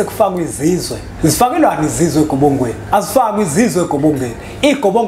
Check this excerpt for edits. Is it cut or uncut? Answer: cut